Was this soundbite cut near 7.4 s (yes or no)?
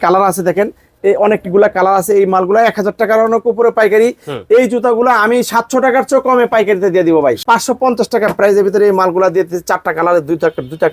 yes